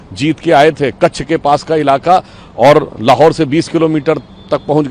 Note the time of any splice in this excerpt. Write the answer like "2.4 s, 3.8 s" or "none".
none